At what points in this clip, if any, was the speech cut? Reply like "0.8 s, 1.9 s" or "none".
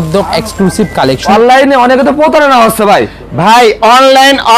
1.2 s